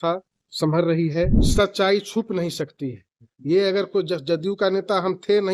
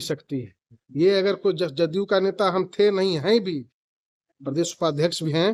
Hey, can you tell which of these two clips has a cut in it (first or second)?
first